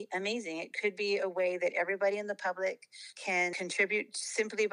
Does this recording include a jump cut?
yes; 1 cut; at 3.5 s

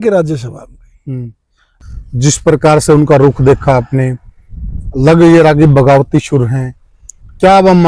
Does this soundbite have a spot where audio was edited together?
yes; 1 cut; at 1.8 s

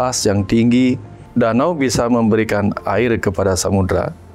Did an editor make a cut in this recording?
yes; 1 cut; at 1.1 s

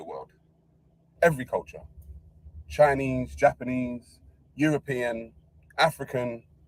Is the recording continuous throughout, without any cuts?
yes; 0 cuts

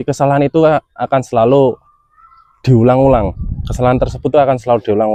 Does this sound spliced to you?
no; 0 cuts

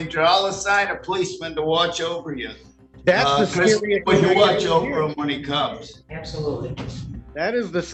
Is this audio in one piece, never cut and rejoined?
yes; 0 cuts

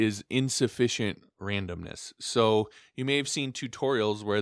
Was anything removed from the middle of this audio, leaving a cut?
yes; 1 cut; at 1.3 s

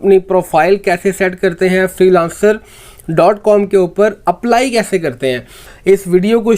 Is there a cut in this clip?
yes; 1 cut; at 5.7 s

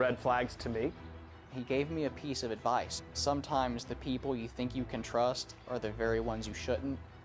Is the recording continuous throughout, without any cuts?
no; 1 cut; at 1.0 s

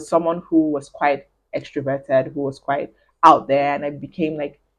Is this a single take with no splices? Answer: yes; 0 cuts

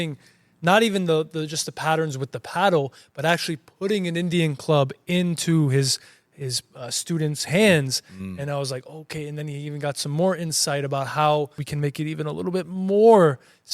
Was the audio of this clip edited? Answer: yes; 1 cut; at 11.6 s

